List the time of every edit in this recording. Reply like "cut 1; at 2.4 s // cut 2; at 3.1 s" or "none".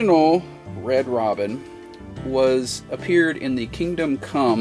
none